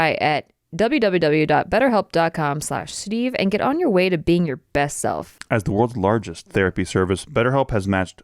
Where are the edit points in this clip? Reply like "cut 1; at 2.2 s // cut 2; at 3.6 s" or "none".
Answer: cut 1; at 5.4 s